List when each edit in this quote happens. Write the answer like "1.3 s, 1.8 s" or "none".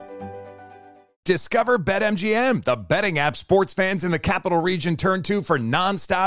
1.1 s

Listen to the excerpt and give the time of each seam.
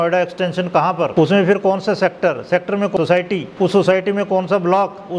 1.1 s, 3.0 s

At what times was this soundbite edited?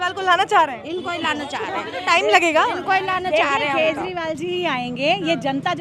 none

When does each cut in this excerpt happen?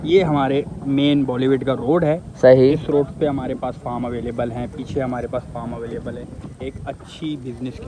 none

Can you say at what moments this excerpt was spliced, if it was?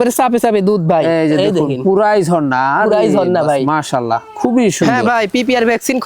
5.0 s

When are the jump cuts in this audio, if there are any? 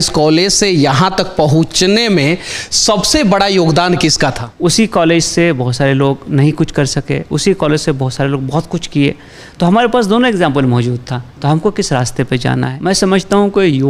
4.5 s, 12.7 s

